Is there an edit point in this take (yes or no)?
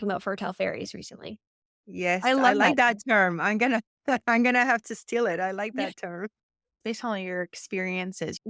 yes